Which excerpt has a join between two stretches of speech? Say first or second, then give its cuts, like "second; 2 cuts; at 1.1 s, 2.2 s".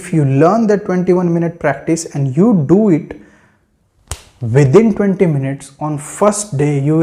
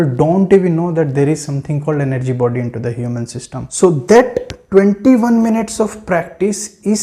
second; 1 cut; at 3.6 s